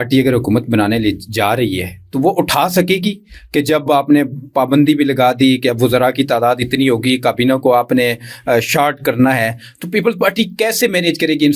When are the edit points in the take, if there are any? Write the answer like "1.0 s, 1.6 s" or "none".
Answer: none